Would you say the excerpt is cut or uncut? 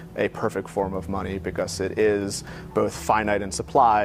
uncut